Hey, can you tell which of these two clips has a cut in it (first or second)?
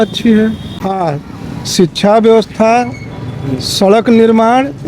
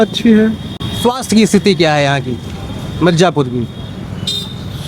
first